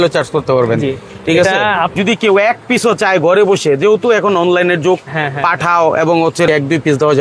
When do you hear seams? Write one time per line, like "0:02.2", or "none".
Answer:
0:01.9
0:06.5

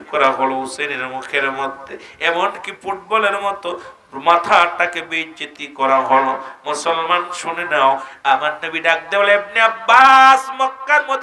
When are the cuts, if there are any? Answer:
0:08.1

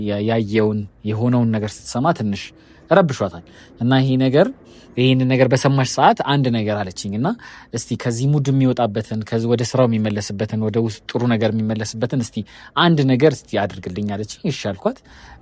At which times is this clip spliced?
none

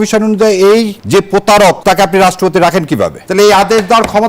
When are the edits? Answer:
0:01.0
0:01.8
0:03.2

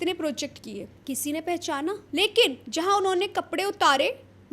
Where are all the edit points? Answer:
0:00.9
0:02.0

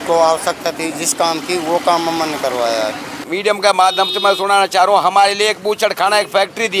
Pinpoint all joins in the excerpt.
0:03.2

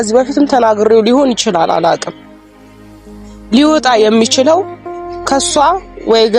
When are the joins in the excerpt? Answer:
0:02.1
0:03.5

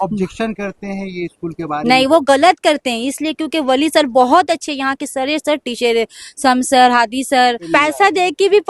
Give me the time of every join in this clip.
0:07.6

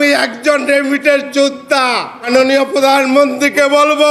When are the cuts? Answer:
0:02.3

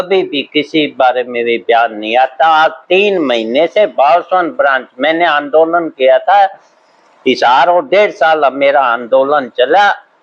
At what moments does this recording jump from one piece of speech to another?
none

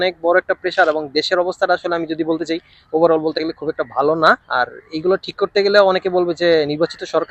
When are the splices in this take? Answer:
none

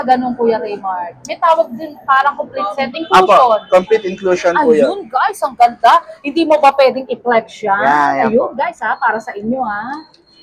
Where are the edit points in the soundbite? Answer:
none

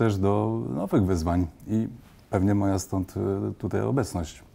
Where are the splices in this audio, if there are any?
none

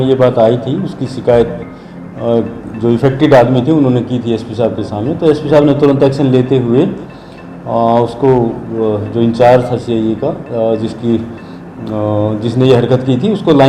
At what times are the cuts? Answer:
none

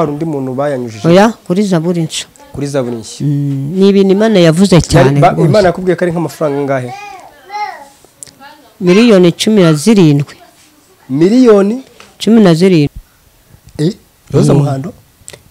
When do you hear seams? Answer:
0:12.9

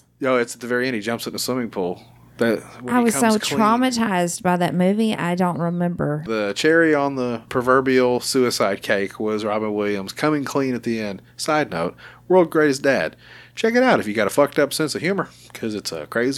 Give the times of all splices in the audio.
0:06.3
0:07.5

